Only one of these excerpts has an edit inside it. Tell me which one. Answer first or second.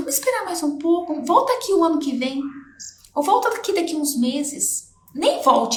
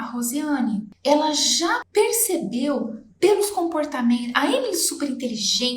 second